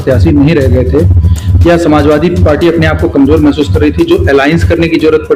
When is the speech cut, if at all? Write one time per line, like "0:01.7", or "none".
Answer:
none